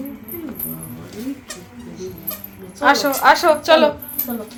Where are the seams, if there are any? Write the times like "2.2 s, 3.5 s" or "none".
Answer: none